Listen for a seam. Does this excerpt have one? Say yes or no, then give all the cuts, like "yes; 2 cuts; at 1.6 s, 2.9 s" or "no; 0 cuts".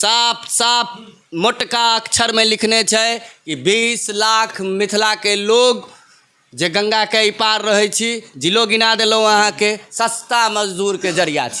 no; 0 cuts